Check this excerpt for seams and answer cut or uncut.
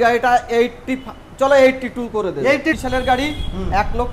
cut